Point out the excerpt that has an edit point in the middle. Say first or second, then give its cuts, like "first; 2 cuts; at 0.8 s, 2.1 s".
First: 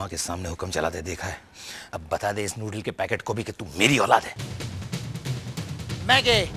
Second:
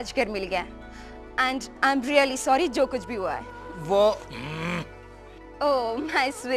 first; 1 cut; at 4.4 s